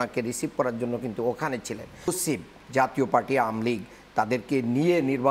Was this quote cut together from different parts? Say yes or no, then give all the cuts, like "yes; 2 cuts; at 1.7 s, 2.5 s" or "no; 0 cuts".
yes; 1 cut; at 2.1 s